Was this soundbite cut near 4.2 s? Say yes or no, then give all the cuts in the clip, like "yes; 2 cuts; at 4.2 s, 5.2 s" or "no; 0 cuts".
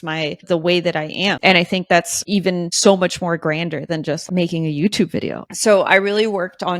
yes; 4 cuts; at 1.4 s, 2.5 s, 4.2 s, 5.4 s